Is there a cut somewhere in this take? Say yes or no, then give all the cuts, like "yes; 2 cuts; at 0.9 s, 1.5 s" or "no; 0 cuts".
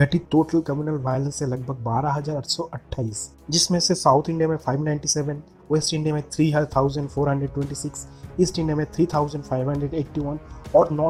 no; 0 cuts